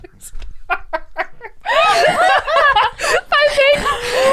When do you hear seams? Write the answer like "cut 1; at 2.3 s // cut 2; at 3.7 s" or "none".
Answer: none